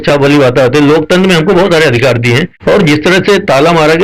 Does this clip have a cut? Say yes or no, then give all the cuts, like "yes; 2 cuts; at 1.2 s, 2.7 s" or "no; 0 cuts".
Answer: yes; 1 cut; at 2.5 s